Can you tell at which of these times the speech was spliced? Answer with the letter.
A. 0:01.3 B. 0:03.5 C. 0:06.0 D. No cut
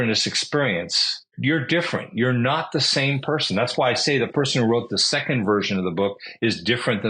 A